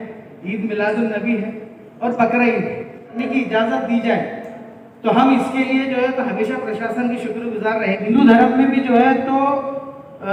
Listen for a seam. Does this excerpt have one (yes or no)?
yes